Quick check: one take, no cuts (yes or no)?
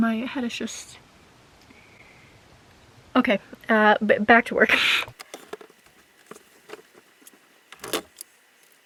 yes